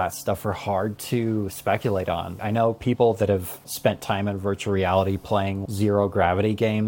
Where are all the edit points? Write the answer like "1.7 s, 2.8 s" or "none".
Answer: 2.4 s, 3.6 s, 5.6 s

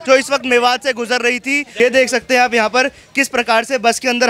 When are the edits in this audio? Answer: 1.7 s

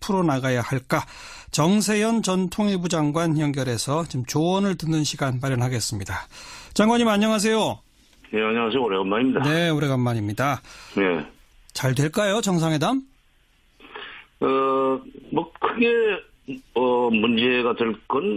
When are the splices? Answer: none

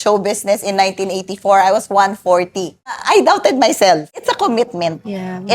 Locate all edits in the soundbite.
3.0 s, 4.1 s

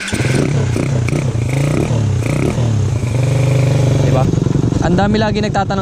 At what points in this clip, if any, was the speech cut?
4.2 s

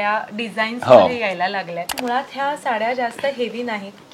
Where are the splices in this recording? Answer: 2.0 s

